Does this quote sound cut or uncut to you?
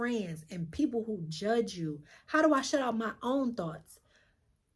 uncut